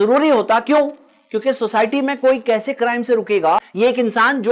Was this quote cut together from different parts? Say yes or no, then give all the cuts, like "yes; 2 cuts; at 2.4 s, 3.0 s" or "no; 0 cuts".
yes; 1 cut; at 3.4 s